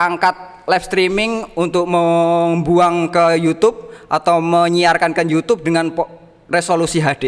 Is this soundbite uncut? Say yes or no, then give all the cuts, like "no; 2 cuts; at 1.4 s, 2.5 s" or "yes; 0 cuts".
yes; 0 cuts